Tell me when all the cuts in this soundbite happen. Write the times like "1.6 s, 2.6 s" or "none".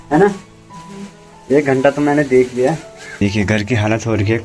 3.2 s